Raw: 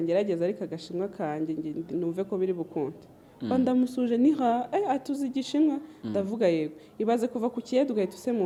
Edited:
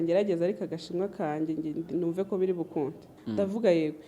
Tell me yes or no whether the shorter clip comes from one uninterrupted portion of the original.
no